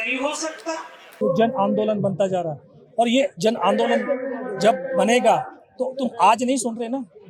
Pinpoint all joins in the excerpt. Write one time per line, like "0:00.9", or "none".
0:01.0